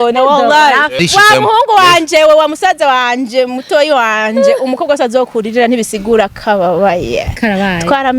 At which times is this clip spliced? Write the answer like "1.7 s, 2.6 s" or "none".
0.9 s

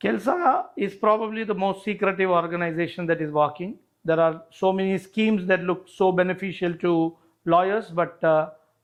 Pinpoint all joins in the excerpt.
none

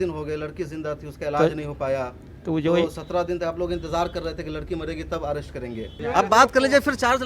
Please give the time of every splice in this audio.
5.9 s

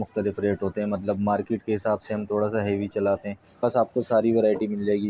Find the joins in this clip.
3.6 s

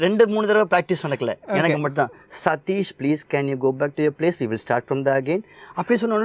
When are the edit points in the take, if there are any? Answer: none

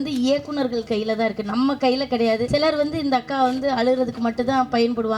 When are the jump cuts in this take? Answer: 2.5 s

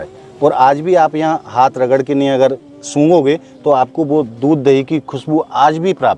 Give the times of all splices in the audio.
none

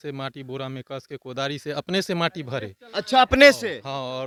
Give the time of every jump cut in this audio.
none

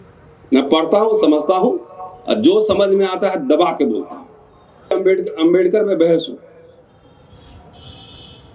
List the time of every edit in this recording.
4.9 s

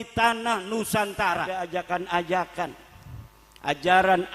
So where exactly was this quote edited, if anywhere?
1.5 s

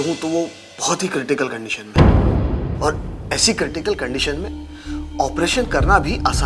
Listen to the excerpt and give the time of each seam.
2.7 s

